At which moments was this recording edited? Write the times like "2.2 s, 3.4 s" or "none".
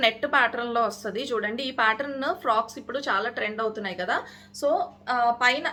none